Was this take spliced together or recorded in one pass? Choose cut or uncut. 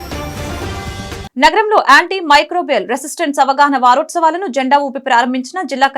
cut